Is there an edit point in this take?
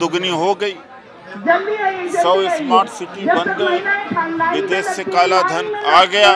no; 0 cuts

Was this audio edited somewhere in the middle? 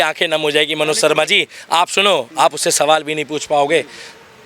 no; 0 cuts

